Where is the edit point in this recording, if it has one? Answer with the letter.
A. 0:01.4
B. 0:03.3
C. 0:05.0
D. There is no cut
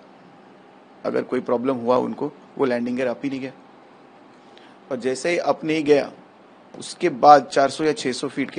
D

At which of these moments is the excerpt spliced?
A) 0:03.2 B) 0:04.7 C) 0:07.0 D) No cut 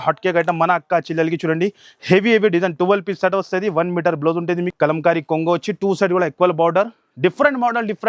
B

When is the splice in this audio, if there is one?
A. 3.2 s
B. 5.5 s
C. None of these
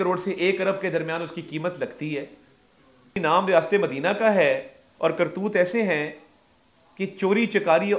A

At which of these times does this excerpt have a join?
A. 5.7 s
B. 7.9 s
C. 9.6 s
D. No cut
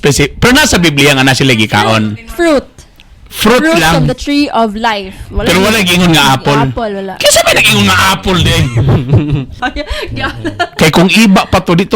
C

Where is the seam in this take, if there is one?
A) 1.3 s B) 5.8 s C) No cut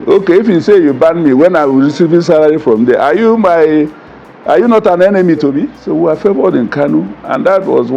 B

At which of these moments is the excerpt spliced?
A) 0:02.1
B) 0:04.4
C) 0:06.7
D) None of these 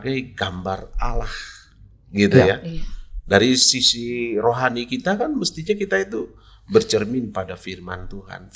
D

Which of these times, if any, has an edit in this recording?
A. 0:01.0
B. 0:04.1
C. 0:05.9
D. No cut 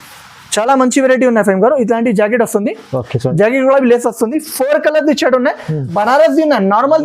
C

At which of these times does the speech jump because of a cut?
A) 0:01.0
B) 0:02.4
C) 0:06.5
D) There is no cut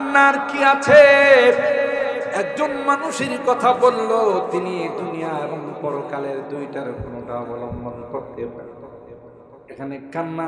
B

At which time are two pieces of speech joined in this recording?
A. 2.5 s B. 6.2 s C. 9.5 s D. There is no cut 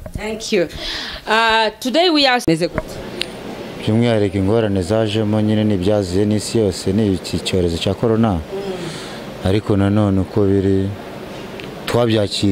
A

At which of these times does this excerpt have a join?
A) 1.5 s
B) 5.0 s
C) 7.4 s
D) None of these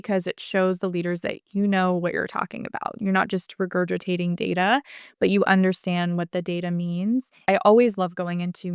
C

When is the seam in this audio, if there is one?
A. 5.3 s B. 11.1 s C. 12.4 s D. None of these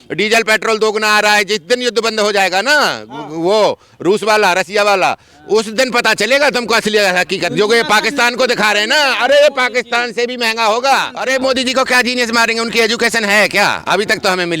B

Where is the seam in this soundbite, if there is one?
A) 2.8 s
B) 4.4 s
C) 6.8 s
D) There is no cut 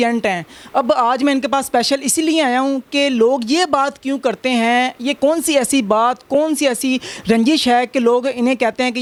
D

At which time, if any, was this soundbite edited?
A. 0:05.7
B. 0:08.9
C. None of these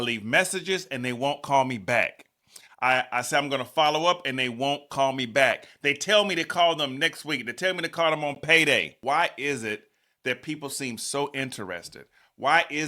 B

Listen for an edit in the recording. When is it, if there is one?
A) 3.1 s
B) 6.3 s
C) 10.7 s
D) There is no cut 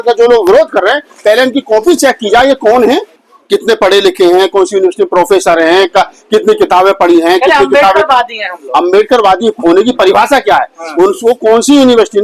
A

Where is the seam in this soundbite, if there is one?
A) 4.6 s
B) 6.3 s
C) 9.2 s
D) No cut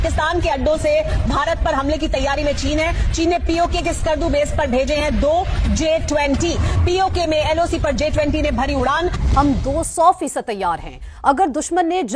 C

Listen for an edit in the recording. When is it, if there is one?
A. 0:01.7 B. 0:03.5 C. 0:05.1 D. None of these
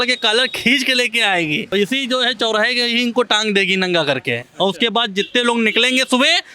A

